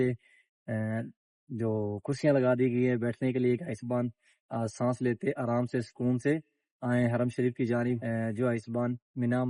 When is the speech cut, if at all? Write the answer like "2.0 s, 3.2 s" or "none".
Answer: 8.0 s